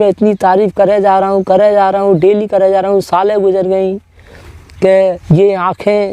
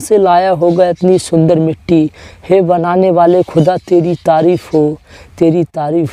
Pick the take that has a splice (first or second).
first